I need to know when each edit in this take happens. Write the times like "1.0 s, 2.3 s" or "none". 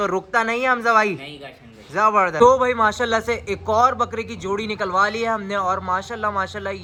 none